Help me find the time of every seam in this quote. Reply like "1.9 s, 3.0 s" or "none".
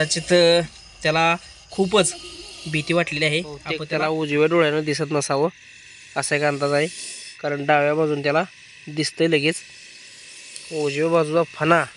3.8 s